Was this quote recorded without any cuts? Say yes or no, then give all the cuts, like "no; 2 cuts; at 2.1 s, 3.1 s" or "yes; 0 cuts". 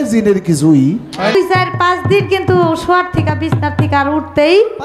no; 1 cut; at 1.4 s